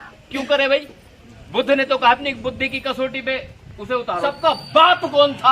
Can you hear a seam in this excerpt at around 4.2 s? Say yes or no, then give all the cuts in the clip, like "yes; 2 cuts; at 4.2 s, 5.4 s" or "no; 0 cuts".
yes; 1 cut; at 4.2 s